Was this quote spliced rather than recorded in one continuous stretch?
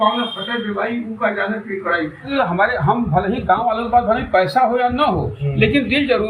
yes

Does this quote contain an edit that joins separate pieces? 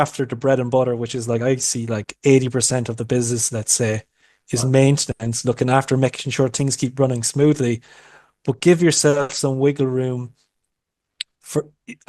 no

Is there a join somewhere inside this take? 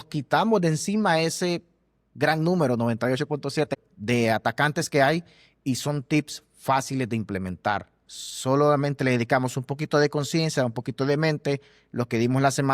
yes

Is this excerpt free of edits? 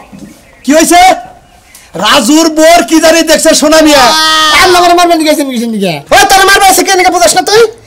no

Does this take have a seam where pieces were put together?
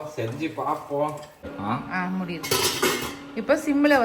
yes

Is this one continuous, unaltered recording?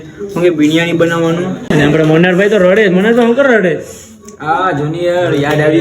no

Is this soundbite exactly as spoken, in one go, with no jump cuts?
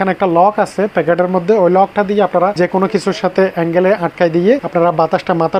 yes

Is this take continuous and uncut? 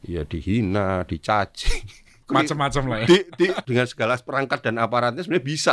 no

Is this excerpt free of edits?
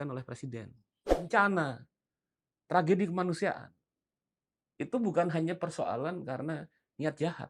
no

